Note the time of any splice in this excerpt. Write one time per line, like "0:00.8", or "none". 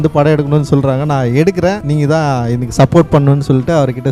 none